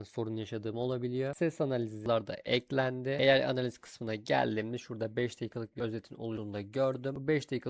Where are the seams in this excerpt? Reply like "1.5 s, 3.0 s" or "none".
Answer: 2.0 s